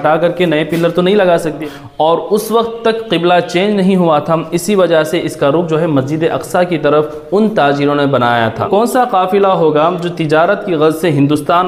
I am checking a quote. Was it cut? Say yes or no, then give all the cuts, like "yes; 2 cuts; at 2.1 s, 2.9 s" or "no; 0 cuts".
yes; 2 cuts; at 1.7 s, 8.7 s